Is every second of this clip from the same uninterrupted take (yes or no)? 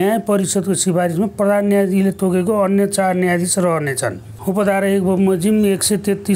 no